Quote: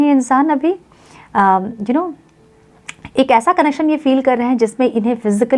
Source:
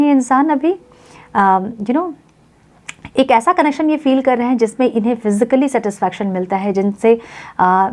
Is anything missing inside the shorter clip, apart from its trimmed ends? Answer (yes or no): no